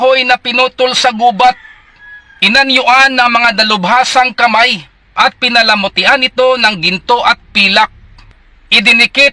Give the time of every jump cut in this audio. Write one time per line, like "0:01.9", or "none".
0:08.1